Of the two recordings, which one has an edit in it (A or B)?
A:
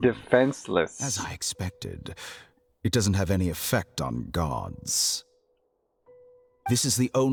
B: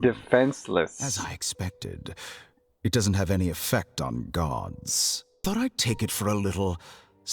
B